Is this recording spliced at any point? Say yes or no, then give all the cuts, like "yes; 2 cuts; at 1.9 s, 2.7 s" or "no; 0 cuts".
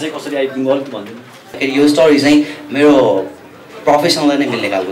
yes; 1 cut; at 1.6 s